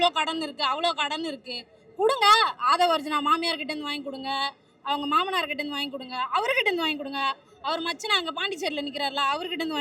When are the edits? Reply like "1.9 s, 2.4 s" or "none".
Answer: none